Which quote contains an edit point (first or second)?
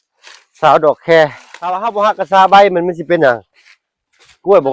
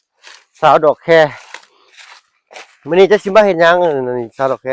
first